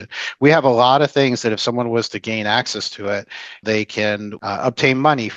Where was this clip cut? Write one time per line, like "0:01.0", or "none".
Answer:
0:03.6
0:04.3